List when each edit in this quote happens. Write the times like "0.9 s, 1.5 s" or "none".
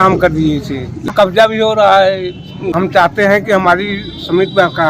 1.0 s, 2.7 s